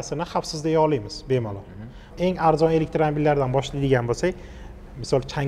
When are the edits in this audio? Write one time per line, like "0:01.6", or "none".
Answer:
0:02.0

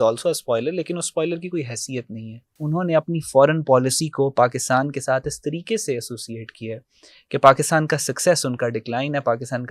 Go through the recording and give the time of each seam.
0:02.6

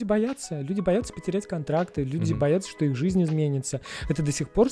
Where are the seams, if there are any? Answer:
none

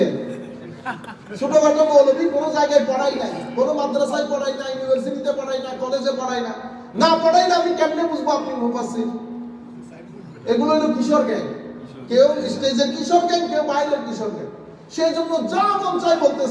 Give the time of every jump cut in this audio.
none

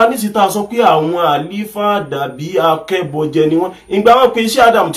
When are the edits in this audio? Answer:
none

